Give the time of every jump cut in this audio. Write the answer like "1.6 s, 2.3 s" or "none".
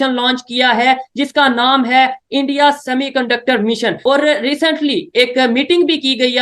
4.0 s